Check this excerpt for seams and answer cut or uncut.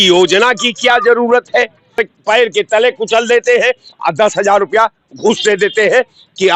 cut